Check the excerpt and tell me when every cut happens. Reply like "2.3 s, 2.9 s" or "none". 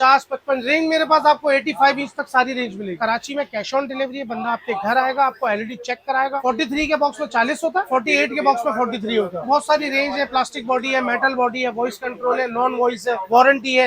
3.0 s, 6.4 s